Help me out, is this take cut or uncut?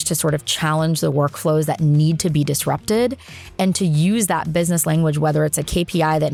uncut